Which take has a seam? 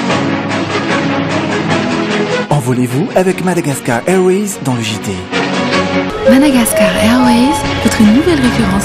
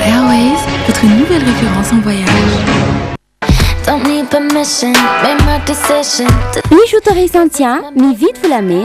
second; 1 cut; at 3.2 s

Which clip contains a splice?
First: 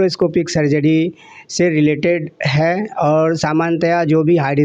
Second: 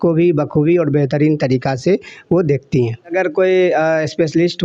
second; 1 cut; at 3.0 s

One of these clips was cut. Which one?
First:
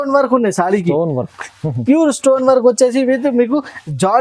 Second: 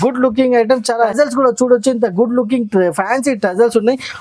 second; 1 cut; at 1.1 s

